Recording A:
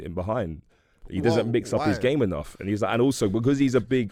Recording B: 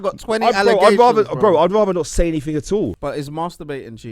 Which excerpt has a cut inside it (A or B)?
B